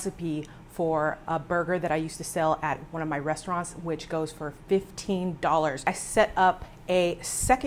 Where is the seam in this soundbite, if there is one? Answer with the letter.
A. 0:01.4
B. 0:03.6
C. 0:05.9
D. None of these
C